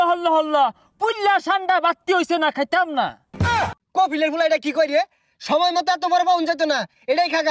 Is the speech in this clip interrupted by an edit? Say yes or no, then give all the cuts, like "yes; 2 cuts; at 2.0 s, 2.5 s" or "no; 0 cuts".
yes; 1 cut; at 3.5 s